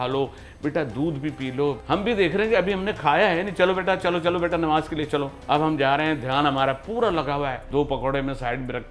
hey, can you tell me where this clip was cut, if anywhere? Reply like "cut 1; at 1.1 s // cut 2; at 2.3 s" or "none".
cut 1; at 1.8 s // cut 2; at 5.3 s // cut 3; at 7.6 s